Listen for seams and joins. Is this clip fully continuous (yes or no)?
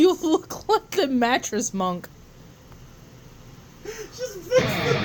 yes